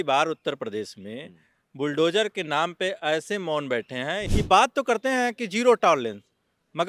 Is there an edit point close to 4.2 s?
yes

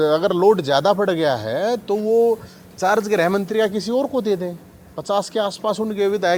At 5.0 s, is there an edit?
no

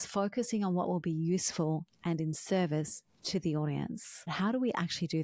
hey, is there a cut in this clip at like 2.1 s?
no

